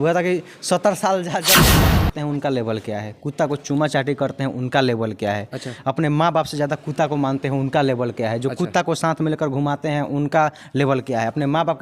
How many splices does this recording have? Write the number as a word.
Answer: one